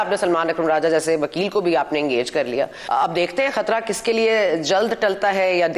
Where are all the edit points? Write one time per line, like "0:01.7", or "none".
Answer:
0:02.8